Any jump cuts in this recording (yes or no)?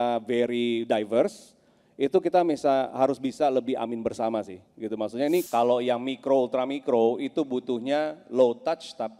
yes